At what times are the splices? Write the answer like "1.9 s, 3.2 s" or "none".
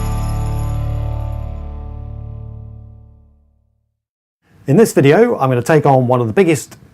1.1 s